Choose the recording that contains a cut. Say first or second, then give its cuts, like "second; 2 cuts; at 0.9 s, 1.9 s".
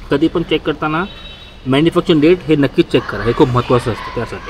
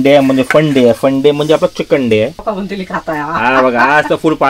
second; 1 cut; at 2.4 s